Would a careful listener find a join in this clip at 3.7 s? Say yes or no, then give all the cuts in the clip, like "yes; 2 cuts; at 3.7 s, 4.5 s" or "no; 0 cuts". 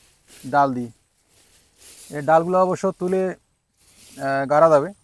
no; 0 cuts